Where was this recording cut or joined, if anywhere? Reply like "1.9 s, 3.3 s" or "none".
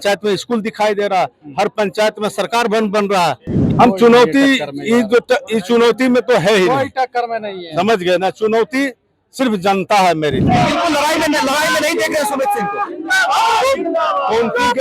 3.6 s, 10.5 s